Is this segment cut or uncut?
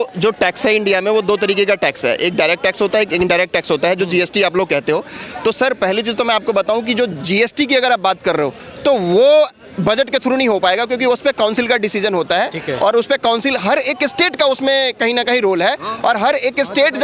uncut